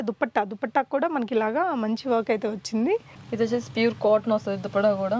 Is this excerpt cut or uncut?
uncut